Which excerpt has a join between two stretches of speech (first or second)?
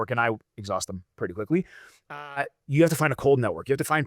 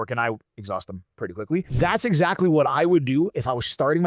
second